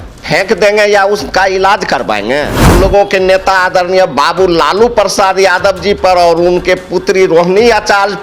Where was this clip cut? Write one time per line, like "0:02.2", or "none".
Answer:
0:02.6